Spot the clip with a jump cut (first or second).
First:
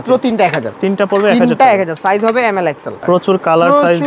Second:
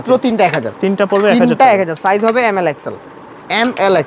first